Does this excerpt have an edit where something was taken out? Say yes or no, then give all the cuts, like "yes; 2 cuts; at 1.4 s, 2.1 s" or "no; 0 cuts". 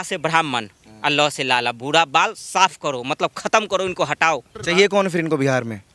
yes; 1 cut; at 4.5 s